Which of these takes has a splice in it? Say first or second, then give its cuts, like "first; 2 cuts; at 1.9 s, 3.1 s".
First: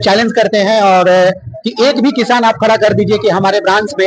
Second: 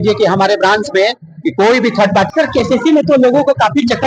second; 1 cut; at 2.3 s